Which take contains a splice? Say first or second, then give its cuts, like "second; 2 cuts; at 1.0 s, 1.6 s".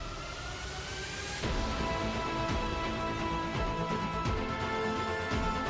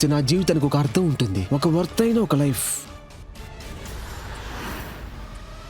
second; 1 cut; at 2.6 s